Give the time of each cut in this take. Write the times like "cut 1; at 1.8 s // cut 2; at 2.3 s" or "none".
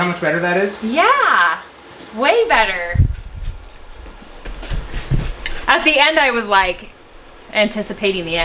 none